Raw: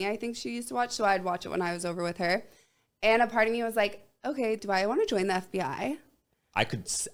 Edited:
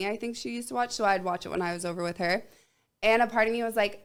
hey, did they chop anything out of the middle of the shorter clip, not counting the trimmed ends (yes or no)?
no